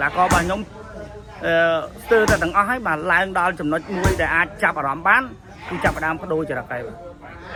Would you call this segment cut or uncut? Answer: uncut